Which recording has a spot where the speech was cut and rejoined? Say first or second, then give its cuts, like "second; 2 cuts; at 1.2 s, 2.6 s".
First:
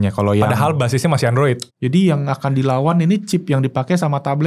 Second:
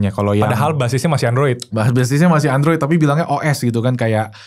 first; 1 cut; at 1.6 s